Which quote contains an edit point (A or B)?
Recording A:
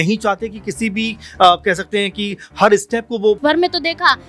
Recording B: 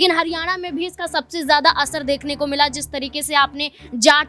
A